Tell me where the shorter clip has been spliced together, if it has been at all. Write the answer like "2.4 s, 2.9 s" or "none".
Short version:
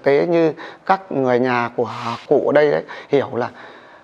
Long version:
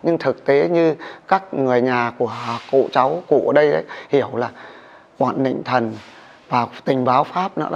2.2 s